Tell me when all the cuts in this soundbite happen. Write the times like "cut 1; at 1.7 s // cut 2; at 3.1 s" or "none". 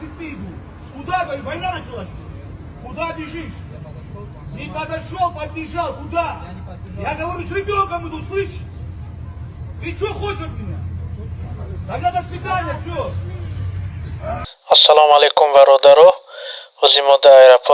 cut 1; at 14.5 s